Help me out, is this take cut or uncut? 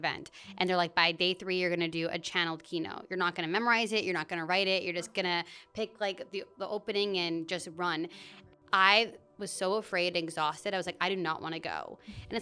cut